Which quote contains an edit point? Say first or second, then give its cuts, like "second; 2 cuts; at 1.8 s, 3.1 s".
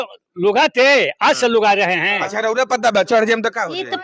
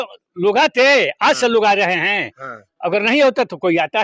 first; 1 cut; at 2.3 s